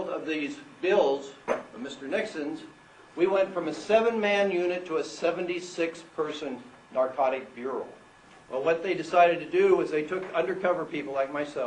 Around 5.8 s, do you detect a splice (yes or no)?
yes